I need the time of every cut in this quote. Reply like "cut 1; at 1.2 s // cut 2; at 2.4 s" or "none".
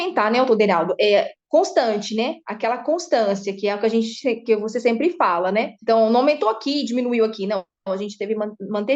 none